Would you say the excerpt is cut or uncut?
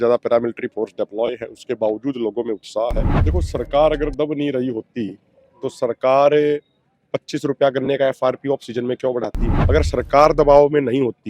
cut